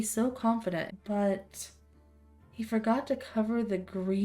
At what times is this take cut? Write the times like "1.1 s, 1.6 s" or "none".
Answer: 0.9 s